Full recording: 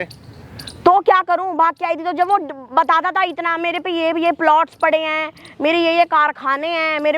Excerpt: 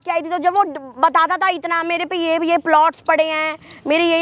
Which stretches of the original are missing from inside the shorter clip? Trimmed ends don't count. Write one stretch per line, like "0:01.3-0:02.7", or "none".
none